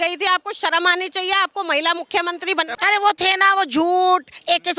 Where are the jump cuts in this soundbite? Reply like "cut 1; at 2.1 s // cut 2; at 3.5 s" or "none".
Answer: cut 1; at 2.7 s